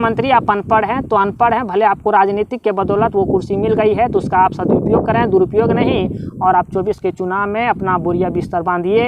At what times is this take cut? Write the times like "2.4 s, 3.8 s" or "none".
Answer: none